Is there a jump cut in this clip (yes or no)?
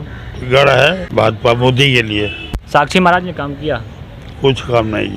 yes